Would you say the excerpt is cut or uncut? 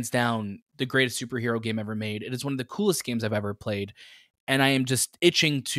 uncut